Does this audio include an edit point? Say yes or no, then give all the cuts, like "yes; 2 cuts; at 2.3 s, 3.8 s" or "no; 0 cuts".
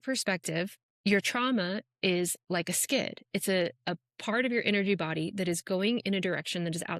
no; 0 cuts